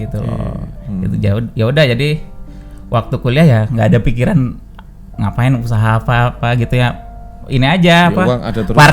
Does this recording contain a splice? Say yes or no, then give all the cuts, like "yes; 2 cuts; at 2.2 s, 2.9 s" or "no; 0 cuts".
no; 0 cuts